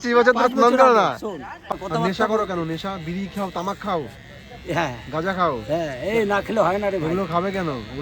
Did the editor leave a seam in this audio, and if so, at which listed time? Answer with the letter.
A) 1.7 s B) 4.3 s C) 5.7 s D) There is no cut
A